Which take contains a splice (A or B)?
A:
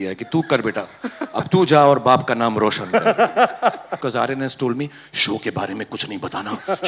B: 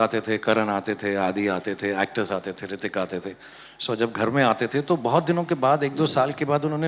A